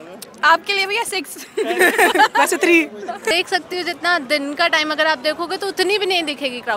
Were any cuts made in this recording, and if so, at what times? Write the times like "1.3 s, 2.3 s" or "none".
3.3 s